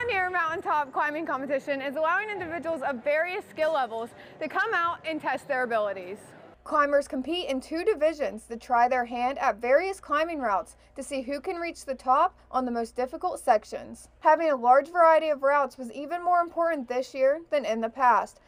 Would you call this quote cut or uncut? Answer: uncut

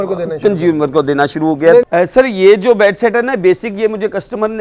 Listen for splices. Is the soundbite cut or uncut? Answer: cut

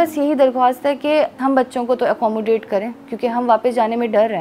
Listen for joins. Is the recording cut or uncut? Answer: cut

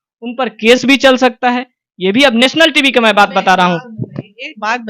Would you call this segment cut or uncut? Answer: uncut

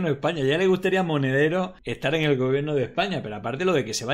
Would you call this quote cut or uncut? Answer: cut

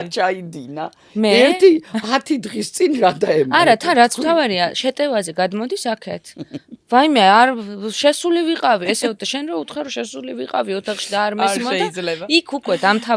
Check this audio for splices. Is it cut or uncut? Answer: uncut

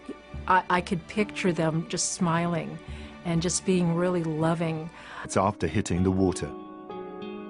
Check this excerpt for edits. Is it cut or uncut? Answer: uncut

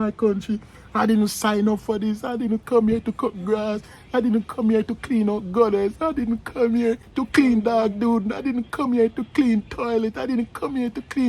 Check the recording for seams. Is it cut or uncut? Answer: uncut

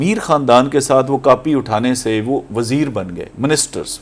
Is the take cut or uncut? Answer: uncut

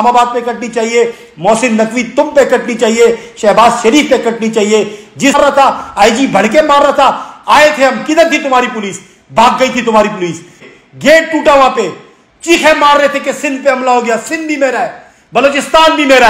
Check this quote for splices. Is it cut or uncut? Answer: cut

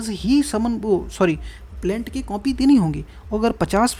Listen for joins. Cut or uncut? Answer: uncut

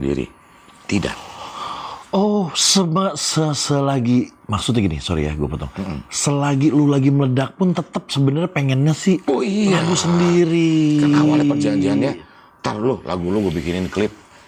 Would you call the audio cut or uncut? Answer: uncut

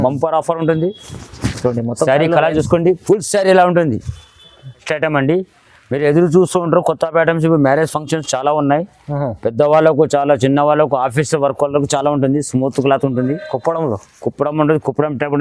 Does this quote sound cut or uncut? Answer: cut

